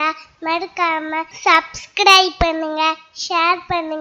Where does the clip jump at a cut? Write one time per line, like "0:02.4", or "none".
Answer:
0:01.3